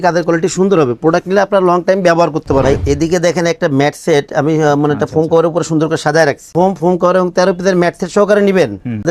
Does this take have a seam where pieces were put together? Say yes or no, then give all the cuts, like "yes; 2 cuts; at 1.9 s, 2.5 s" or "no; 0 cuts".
yes; 2 cuts; at 2.8 s, 6.5 s